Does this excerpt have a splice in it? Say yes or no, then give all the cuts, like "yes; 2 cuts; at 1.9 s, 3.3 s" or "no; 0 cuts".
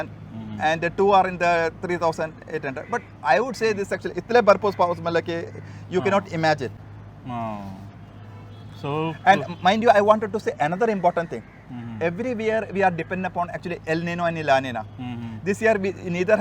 no; 0 cuts